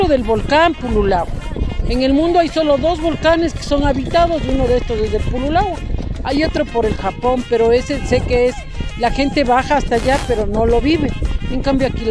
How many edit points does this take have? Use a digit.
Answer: 0